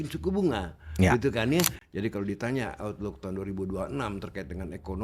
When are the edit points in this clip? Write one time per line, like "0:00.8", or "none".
0:01.8

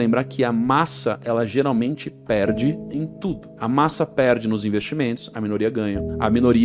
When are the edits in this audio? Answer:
none

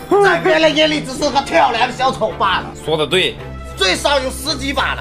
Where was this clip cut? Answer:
0:02.7
0:03.5

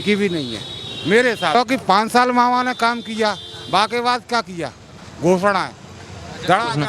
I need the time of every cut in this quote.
0:01.5

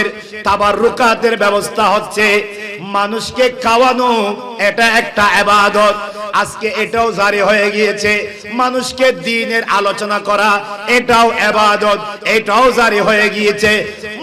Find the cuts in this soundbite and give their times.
none

